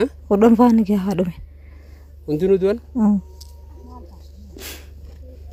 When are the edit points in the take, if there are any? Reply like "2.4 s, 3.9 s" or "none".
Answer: none

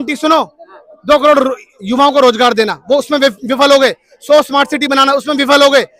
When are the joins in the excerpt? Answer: none

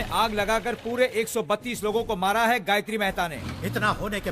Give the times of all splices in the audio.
3.3 s

